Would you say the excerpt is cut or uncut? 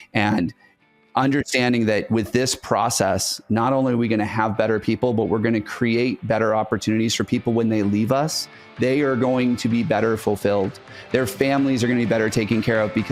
uncut